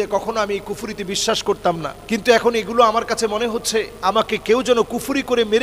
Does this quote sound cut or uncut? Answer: cut